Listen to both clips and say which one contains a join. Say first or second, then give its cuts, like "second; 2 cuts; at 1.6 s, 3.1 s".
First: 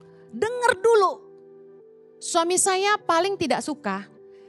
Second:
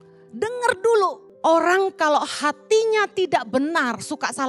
second; 1 cut; at 1.2 s